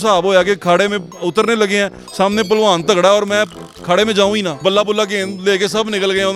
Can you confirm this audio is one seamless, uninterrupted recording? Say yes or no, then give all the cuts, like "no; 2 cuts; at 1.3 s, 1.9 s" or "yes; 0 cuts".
no; 1 cut; at 4.6 s